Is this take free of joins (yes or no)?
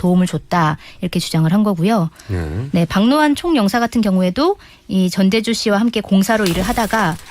no